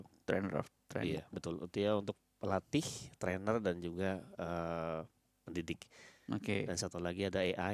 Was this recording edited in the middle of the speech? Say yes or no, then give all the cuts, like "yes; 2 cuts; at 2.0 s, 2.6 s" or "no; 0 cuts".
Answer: no; 0 cuts